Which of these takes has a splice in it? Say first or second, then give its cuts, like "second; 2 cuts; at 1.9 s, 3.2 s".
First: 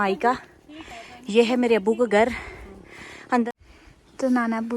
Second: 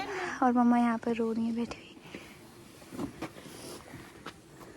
first; 1 cut; at 3.5 s